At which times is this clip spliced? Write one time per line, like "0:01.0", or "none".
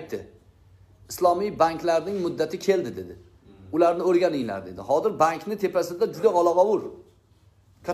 none